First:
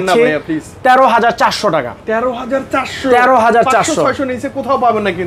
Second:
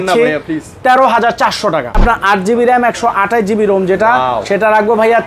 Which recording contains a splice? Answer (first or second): second